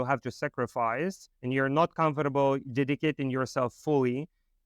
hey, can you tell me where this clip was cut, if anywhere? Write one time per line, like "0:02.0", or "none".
0:01.2